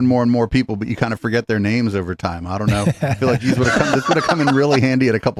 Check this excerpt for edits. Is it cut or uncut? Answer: uncut